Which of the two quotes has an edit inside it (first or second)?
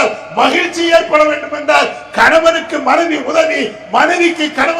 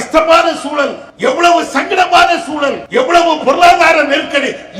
second